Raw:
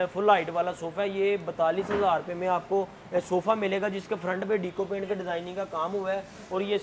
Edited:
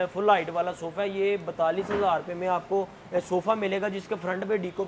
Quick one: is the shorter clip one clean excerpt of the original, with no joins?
yes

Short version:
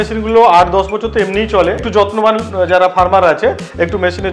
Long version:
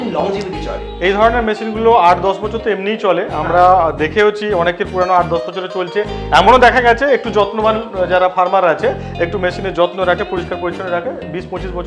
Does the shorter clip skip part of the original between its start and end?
yes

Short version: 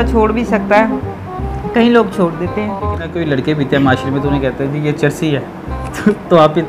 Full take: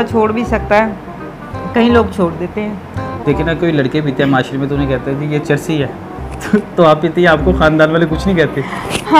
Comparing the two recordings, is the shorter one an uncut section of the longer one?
no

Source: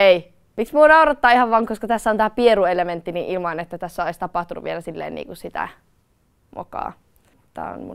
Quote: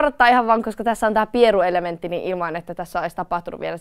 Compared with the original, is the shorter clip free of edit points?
yes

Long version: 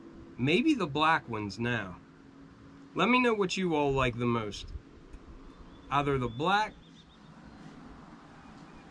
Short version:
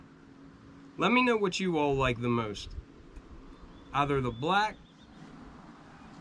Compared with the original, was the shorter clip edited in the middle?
yes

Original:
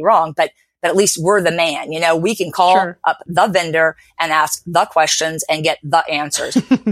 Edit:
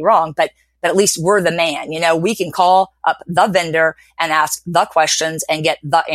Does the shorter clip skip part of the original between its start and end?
no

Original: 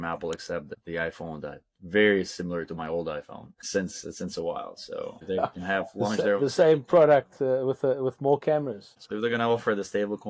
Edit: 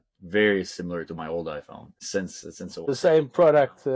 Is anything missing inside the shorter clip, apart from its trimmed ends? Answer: yes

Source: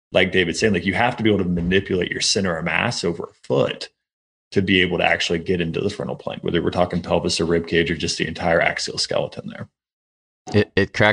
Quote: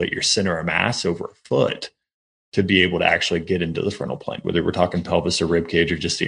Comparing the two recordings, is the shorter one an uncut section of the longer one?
yes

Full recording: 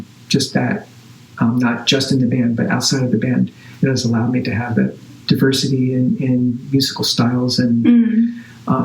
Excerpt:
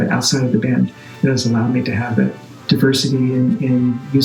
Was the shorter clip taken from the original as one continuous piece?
yes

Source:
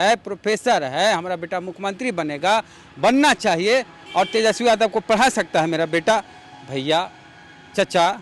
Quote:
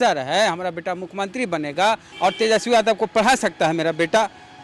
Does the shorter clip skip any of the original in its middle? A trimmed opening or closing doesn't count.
yes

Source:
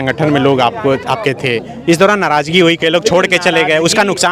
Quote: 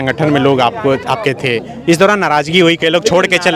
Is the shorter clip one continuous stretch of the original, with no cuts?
yes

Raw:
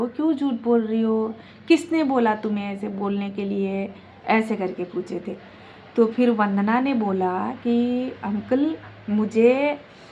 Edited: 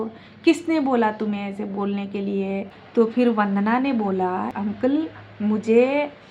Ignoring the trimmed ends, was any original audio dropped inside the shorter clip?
yes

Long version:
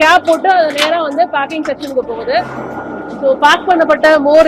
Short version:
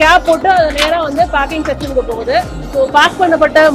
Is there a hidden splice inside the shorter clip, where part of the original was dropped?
yes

